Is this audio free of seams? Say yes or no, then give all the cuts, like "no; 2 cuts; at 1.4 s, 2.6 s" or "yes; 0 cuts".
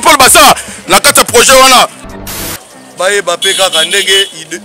no; 1 cut; at 2.3 s